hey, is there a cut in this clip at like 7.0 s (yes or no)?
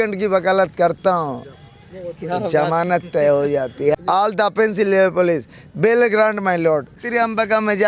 yes